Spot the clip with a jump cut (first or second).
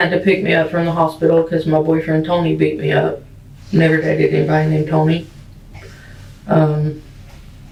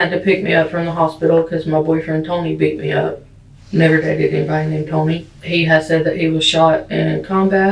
second